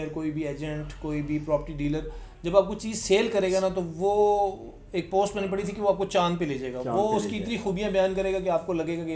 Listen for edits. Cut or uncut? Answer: uncut